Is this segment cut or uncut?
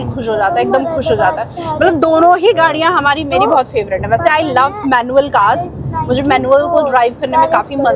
uncut